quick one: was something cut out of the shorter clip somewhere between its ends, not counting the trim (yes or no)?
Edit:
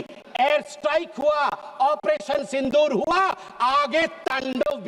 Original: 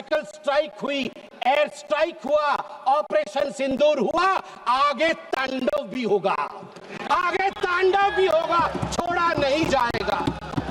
no